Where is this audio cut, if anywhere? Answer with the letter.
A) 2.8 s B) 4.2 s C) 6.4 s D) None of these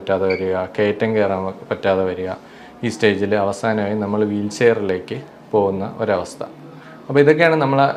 D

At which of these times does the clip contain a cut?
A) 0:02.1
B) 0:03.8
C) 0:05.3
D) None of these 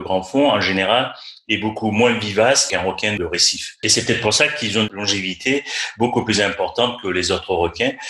B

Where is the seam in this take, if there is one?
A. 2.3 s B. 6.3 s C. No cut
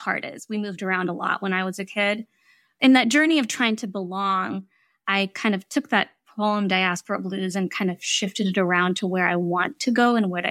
A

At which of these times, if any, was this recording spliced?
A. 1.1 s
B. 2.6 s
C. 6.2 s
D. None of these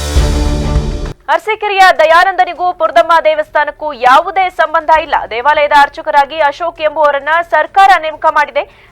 A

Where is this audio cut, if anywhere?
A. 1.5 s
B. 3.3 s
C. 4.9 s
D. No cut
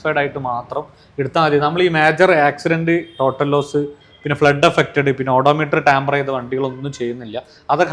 D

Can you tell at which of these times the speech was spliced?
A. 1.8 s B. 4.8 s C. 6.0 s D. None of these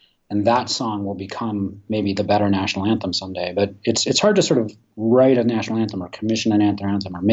D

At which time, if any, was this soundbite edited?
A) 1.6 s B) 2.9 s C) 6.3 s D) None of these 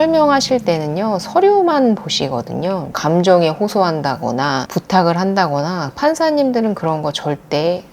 B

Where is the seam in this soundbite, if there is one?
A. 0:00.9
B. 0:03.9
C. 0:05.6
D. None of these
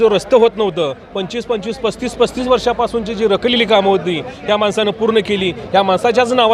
D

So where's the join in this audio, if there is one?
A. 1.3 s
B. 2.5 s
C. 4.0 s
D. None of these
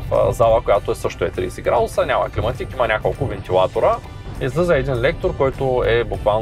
C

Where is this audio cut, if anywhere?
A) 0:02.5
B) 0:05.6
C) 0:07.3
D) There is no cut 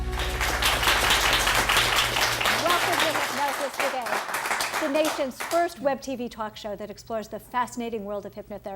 A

